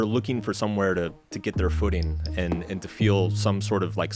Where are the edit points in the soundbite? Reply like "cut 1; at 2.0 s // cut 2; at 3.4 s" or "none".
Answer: none